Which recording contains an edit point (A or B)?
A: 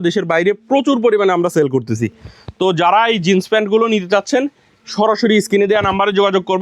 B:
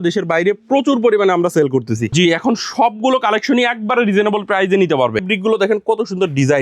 B